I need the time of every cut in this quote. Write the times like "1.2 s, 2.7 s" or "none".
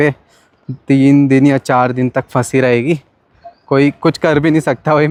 none

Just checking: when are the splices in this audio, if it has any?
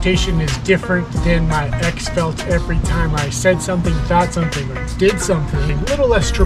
none

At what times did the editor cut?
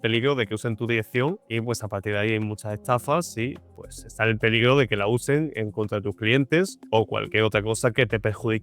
1.4 s, 6.8 s

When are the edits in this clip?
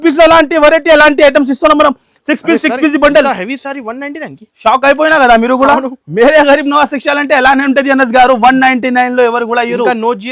none

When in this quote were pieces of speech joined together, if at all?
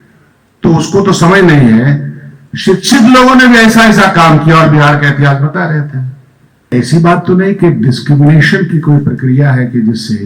6.7 s

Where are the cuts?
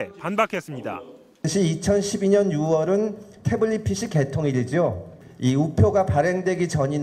none

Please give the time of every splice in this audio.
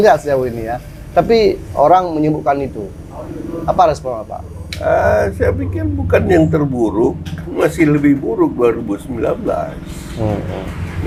none

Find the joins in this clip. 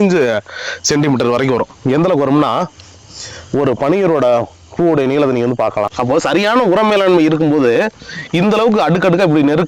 5.9 s

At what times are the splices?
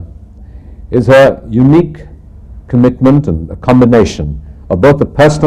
none

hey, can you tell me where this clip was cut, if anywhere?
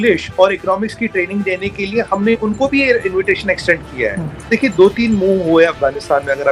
4.5 s

